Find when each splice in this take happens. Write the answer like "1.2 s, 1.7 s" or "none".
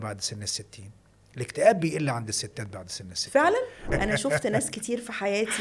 3.8 s